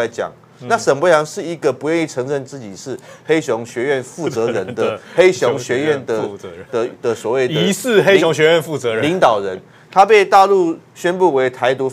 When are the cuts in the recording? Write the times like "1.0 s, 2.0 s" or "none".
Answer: none